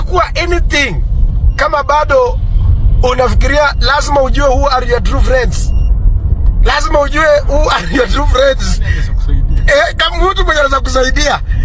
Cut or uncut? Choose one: uncut